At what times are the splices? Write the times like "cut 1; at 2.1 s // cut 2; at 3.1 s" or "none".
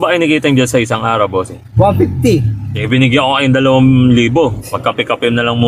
cut 1; at 2.8 s // cut 2; at 4.7 s